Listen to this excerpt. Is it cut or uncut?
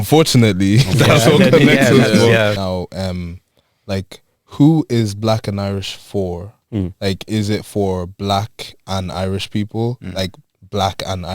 cut